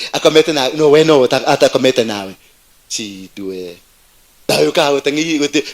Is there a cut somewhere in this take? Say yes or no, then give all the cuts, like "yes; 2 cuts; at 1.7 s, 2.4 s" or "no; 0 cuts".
yes; 1 cut; at 4.5 s